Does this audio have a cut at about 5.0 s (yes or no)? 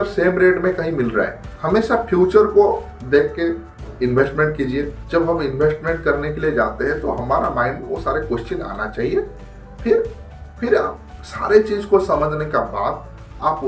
yes